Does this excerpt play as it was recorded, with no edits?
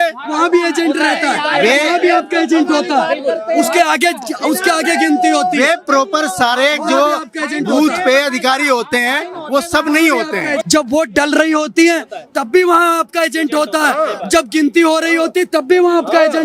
no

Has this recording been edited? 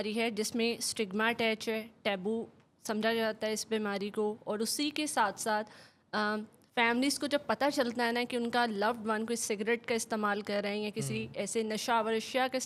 no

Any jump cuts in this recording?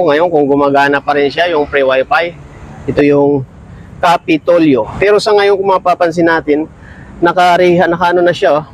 yes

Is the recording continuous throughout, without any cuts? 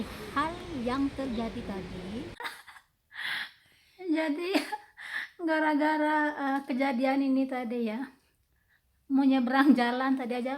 no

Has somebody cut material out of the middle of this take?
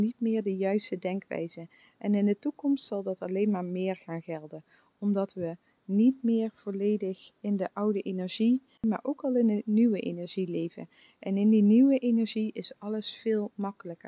yes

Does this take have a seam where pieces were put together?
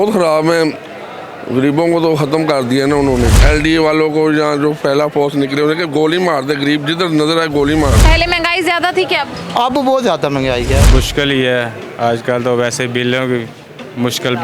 yes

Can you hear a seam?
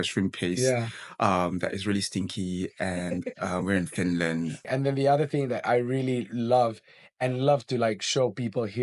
yes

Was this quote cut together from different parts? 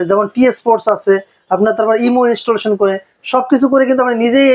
no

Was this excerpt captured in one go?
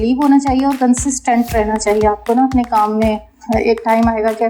no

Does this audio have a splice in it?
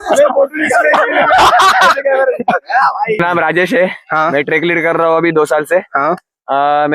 yes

